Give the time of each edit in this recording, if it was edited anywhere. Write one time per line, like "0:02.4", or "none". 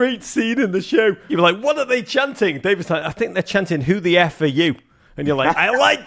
0:01.3

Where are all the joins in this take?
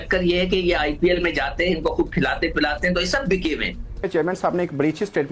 0:04.0

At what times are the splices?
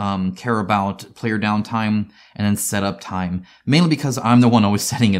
none

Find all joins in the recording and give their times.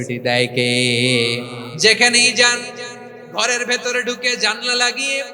0:01.8

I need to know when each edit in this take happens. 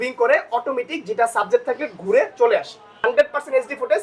0:02.9

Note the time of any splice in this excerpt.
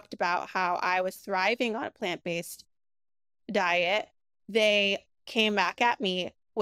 none

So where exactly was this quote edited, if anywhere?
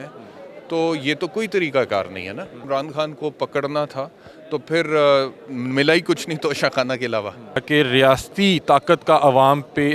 0:02.6
0:07.6

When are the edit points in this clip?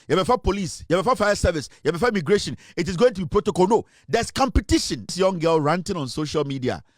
0:05.1

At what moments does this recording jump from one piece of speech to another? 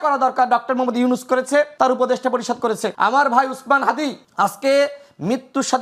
0:01.7
0:02.9
0:04.2

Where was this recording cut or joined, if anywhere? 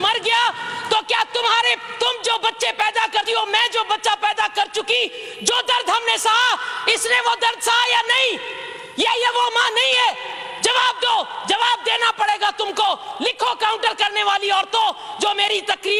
none

